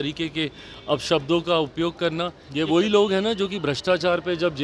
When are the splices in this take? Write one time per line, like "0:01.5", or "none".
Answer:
0:02.4